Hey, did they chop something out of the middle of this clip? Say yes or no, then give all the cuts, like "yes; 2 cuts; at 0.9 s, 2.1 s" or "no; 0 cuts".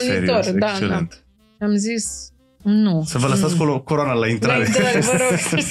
no; 0 cuts